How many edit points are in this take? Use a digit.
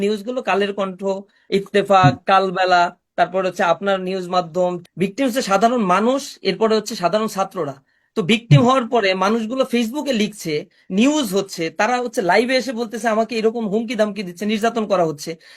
1